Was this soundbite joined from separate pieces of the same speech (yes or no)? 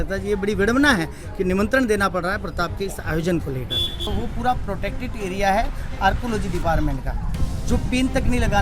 yes